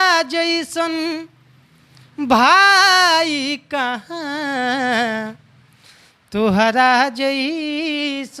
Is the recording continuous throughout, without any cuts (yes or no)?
yes